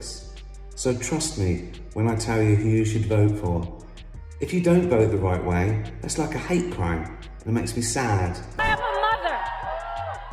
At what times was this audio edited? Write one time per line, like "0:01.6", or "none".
0:08.6